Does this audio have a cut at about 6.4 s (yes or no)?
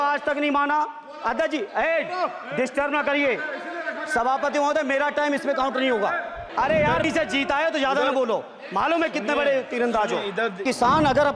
yes